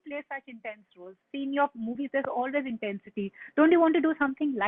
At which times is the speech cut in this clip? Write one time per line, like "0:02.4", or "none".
none